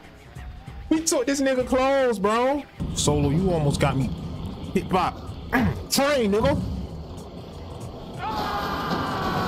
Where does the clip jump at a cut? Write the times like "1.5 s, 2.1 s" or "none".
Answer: 2.9 s